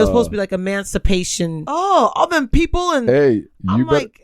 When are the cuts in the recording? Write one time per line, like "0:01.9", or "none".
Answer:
0:01.6